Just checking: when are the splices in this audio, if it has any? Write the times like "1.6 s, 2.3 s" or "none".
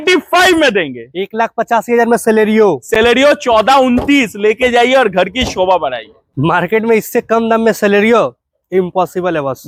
none